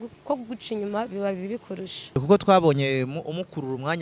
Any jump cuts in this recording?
yes; 1 cut; at 2.2 s

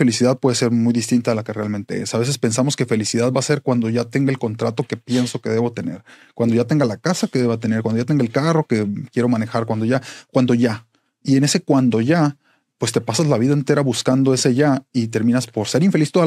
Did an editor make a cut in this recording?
no; 0 cuts

